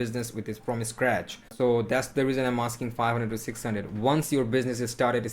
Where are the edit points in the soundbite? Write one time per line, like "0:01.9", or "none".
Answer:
0:01.5